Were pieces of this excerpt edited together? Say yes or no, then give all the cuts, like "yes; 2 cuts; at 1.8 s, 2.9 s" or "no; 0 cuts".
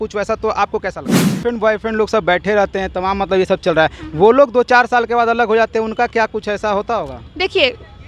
yes; 1 cut; at 1.4 s